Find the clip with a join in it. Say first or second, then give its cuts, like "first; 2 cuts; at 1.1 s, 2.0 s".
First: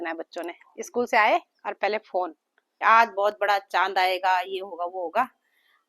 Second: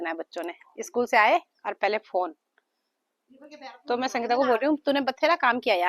first; 1 cut; at 2.7 s